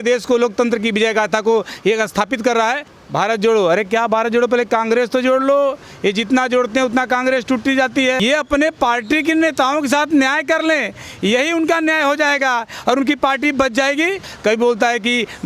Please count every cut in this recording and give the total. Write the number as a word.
three